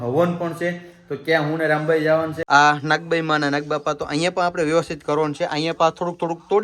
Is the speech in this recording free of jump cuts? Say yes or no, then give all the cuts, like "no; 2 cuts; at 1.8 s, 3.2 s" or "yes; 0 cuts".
no; 1 cut; at 2.4 s